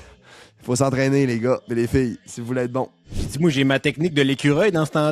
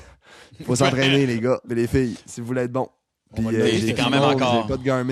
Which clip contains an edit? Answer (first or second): first